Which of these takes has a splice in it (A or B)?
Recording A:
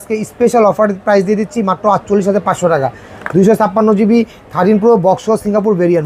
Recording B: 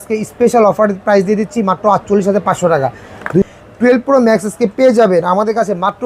B